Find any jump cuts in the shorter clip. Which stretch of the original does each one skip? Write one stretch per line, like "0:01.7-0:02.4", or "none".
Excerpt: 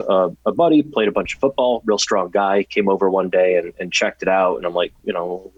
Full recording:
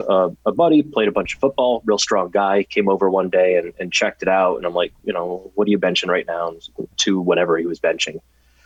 none

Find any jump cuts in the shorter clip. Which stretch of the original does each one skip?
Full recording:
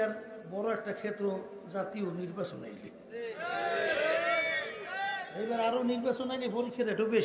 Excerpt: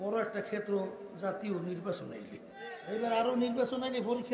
0:03.3-0:05.2

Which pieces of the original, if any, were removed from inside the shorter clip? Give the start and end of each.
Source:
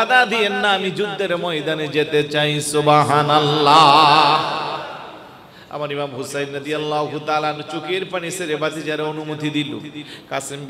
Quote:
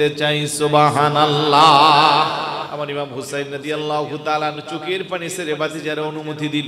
0:04.8-0:05.7

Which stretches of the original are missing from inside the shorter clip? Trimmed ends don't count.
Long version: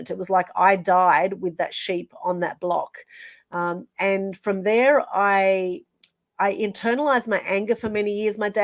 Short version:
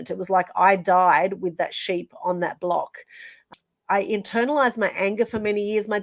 0:03.4-0:05.9

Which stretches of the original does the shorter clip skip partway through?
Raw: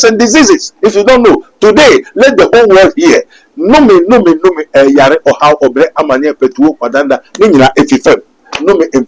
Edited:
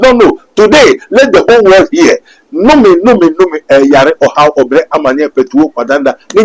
none

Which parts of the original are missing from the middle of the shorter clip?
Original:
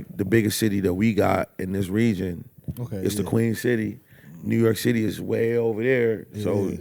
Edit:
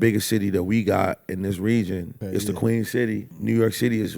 0:02.4-0:02.8
0:04.0-0:04.3

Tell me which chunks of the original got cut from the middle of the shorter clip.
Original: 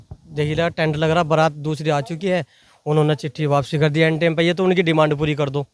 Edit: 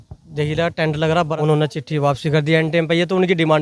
0:01.3-0:02.8

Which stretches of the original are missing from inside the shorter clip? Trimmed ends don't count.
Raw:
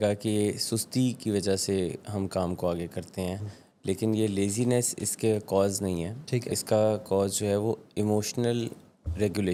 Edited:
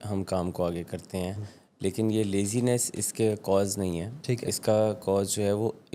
none

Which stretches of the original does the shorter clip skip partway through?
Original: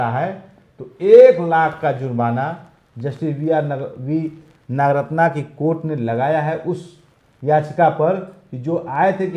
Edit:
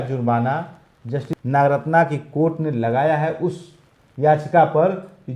0:03.2-0:04.5

